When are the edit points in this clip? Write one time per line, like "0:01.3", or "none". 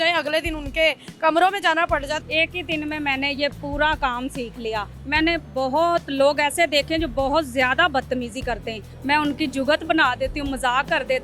0:02.2
0:05.0
0:08.9